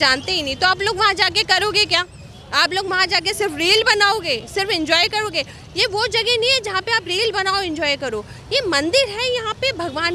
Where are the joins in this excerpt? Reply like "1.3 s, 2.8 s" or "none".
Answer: none